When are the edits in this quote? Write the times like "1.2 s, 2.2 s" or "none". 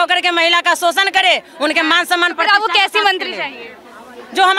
none